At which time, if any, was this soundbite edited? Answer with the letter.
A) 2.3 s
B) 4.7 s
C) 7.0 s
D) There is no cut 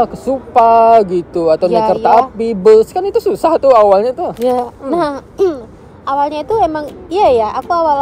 D